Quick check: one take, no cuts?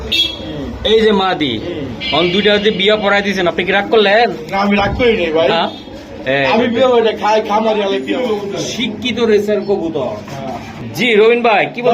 no; 1 cut; at 8.1 s

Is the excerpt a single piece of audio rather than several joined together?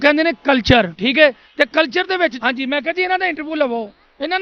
no; 1 cut; at 2.4 s

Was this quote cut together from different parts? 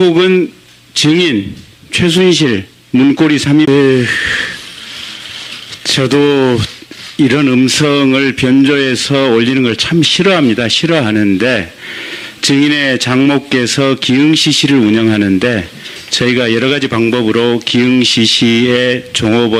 no; 0 cuts

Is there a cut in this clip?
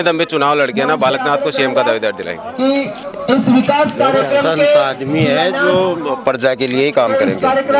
no; 0 cuts

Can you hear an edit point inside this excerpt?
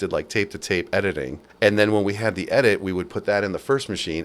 yes; 1 cut; at 1.4 s

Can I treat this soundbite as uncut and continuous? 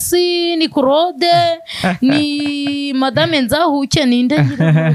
yes; 0 cuts

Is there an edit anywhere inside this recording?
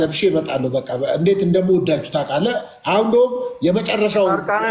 no; 0 cuts

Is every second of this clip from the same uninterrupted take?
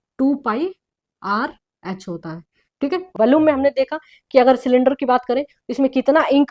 no; 1 cut; at 3.0 s

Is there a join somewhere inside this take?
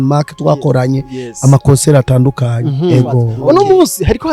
yes; 1 cut; at 3.3 s

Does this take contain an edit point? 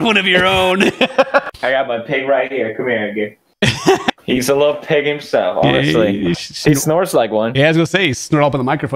yes; 2 cuts; at 1.4 s, 4.1 s

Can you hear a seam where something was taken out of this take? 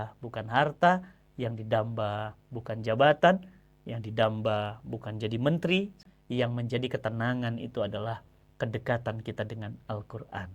yes; 1 cut; at 6.0 s

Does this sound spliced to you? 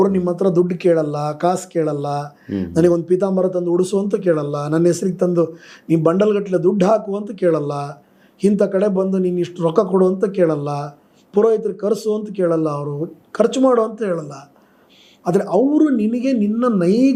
no; 0 cuts

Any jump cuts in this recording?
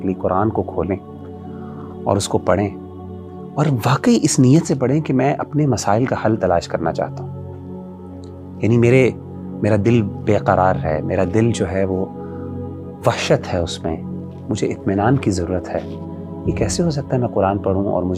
no; 0 cuts

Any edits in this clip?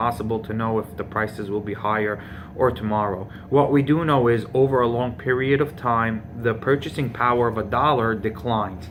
no; 0 cuts

